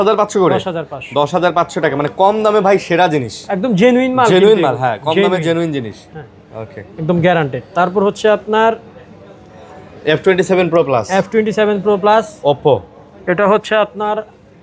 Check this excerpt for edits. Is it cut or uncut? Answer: uncut